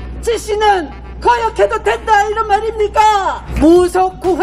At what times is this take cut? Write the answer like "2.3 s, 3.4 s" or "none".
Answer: 3.5 s